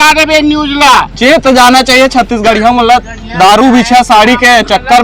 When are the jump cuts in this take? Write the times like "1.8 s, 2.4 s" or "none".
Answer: 1.1 s